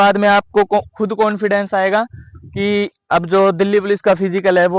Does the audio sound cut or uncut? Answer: uncut